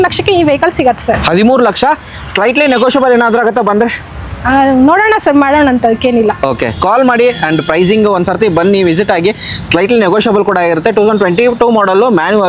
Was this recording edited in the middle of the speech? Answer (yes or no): no